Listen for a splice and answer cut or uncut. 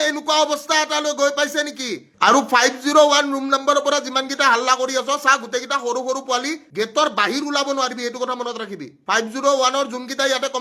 uncut